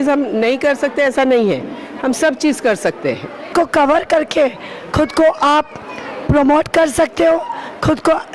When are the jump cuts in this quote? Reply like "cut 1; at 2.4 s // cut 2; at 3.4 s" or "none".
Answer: cut 1; at 3.5 s